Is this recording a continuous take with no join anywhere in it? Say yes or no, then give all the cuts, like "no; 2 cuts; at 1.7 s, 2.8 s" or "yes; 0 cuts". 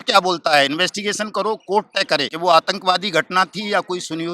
no; 1 cut; at 2.3 s